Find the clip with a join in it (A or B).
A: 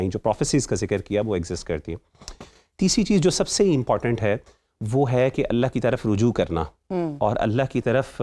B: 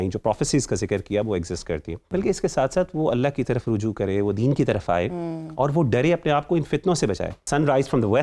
B